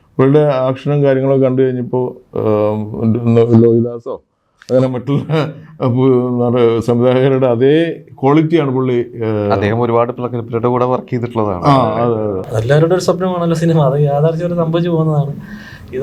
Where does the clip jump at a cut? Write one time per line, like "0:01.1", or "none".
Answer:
0:12.4